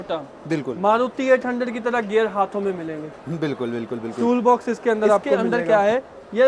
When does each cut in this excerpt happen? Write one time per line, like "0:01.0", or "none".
0:05.3